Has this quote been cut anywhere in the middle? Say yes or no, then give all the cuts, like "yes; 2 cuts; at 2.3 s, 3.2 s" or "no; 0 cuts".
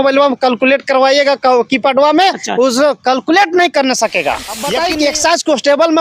yes; 1 cut; at 4.8 s